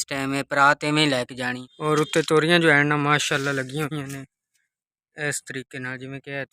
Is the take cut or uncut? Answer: cut